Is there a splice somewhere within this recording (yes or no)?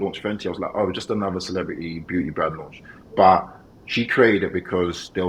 no